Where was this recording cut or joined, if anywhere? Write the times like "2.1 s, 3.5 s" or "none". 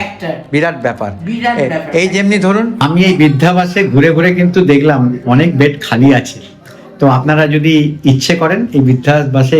2.8 s